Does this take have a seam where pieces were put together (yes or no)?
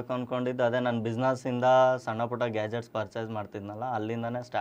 no